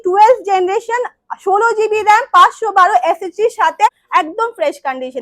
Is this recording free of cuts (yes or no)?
no